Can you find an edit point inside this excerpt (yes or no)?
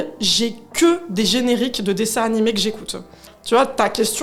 yes